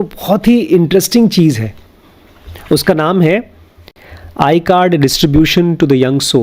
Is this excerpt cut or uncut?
uncut